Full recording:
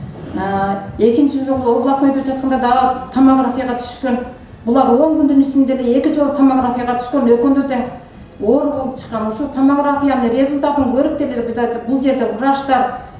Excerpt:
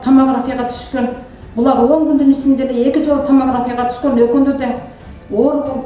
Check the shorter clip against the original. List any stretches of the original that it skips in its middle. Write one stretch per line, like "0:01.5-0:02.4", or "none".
none